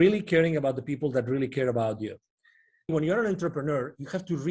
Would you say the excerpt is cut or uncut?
cut